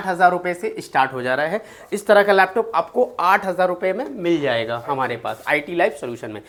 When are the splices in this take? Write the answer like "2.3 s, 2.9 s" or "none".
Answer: none